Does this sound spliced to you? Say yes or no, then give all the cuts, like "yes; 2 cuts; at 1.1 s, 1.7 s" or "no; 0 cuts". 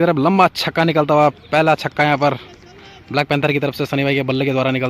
no; 0 cuts